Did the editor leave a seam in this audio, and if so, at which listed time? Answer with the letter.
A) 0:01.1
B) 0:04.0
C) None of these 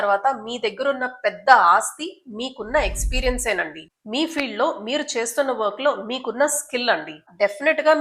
C